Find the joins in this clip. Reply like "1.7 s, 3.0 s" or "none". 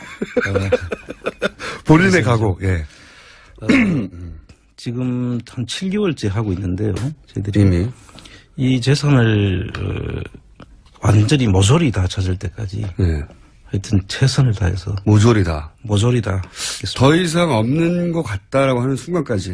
none